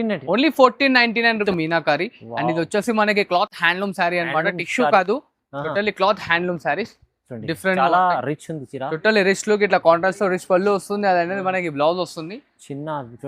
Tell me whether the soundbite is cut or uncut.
cut